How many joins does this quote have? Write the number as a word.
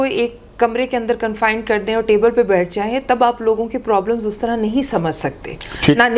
zero